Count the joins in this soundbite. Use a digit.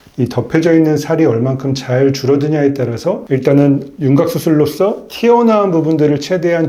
1